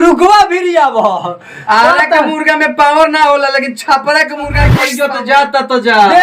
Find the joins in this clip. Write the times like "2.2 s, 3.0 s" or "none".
4.8 s